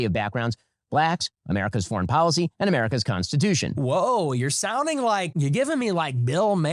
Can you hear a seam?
yes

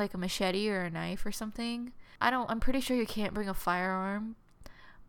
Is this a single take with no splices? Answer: no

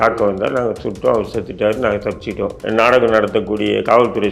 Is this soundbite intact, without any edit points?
no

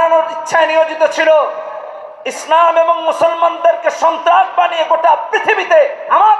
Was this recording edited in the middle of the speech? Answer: no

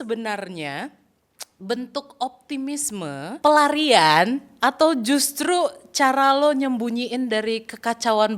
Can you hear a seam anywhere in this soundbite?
yes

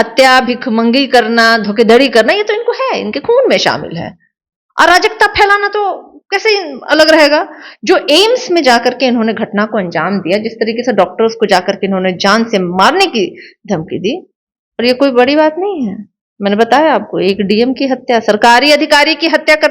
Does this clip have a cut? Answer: no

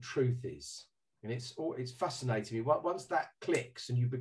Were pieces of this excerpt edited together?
no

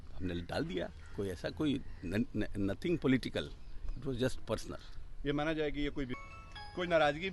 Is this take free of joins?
no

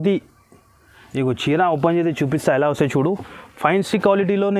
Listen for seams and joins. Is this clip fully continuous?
yes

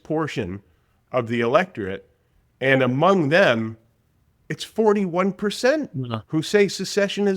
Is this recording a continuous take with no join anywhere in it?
yes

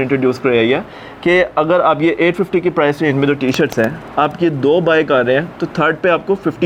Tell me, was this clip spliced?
no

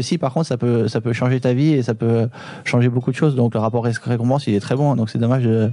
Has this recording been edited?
yes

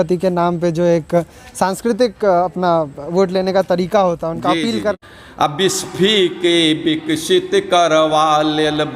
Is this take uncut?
no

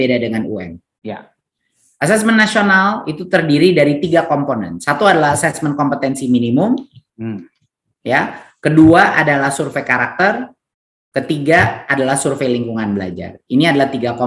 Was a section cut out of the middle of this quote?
no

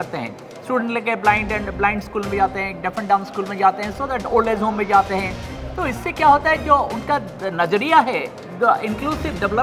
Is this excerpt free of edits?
yes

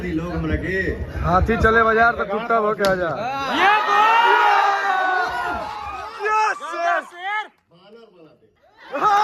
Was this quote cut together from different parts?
no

